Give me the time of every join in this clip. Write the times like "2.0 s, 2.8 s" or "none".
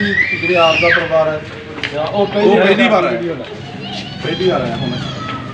none